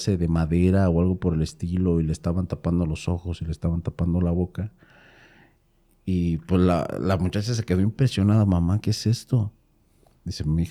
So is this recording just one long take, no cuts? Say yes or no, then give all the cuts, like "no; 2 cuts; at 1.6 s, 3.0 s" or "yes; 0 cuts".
yes; 0 cuts